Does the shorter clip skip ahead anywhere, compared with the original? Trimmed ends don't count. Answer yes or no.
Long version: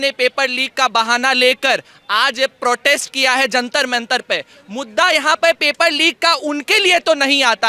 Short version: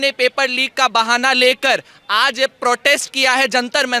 no